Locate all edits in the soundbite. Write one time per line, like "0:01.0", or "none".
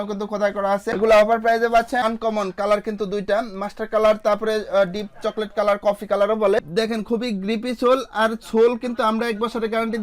0:02.0
0:06.6